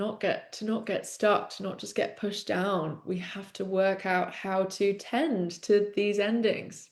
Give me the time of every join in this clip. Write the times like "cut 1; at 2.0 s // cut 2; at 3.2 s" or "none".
none